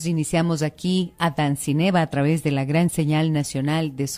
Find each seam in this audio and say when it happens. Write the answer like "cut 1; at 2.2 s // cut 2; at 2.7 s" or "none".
none

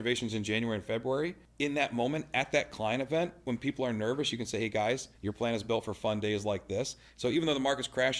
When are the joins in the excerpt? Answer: cut 1; at 1.4 s // cut 2; at 5.1 s

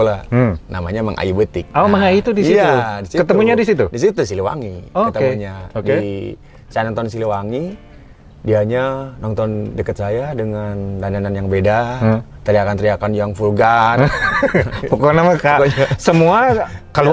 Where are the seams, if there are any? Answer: cut 1; at 1.7 s

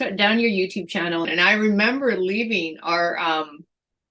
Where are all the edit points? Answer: cut 1; at 1.3 s

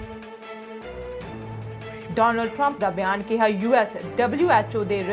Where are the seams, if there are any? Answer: cut 1; at 1.1 s // cut 2; at 2.1 s

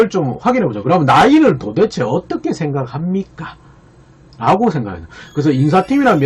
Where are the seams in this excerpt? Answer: none

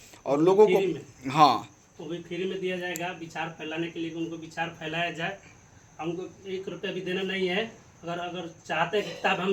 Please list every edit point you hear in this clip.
none

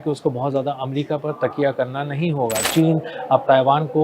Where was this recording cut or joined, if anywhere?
cut 1; at 2.7 s

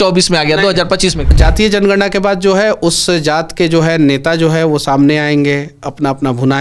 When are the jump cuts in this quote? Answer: cut 1; at 1.3 s

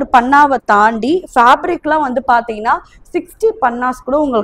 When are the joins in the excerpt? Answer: none

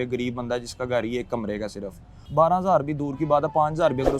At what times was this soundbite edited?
cut 1; at 2.2 s

